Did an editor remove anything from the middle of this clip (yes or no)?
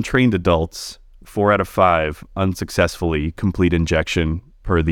no